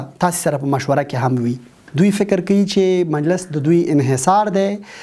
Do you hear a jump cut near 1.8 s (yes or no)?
yes